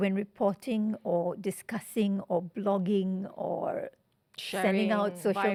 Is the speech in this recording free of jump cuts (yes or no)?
yes